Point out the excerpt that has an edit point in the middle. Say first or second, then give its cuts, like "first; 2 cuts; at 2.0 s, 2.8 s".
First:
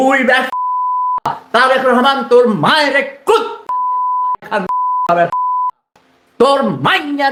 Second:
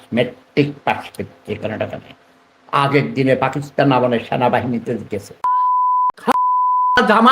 second; 1 cut; at 5.4 s